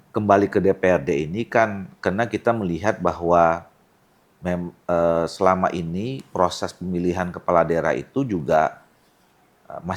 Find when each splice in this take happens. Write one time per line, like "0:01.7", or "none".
none